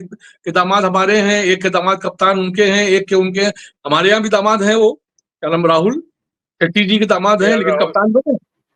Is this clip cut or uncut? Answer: uncut